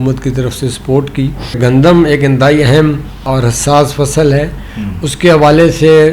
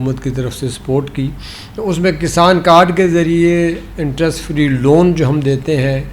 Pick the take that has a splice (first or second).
first